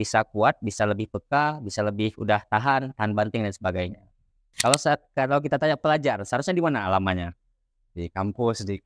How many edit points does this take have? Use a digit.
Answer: 1